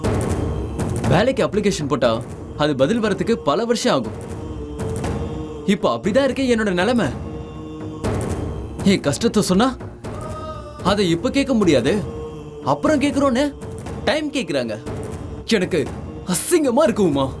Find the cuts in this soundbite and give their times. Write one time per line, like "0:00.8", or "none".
none